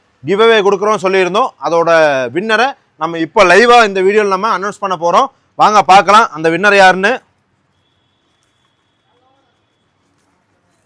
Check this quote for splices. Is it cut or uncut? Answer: uncut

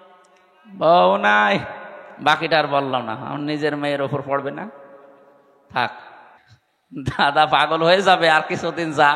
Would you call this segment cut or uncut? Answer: cut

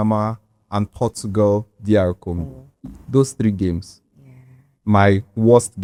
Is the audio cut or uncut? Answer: uncut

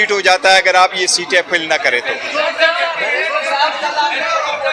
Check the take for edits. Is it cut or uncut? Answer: cut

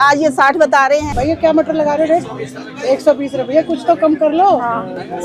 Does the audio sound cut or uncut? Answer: cut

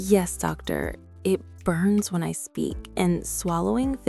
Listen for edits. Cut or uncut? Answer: uncut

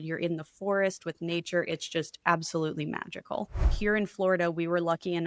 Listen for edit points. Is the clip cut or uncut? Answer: cut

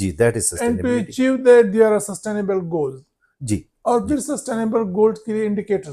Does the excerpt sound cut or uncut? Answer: uncut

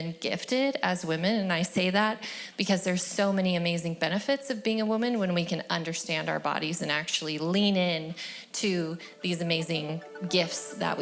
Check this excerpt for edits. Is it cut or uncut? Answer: cut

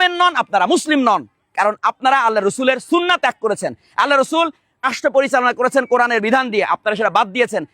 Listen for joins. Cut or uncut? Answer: cut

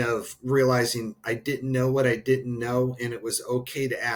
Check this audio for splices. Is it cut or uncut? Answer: uncut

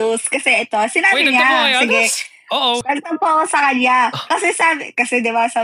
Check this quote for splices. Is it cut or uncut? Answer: cut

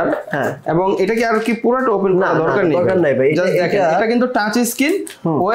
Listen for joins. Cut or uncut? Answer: uncut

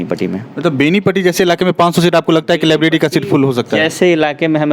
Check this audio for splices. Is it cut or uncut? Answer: uncut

